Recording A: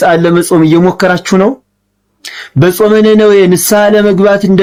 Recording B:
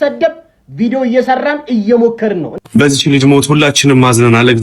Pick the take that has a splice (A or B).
B